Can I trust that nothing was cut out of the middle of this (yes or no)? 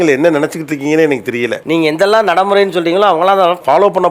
yes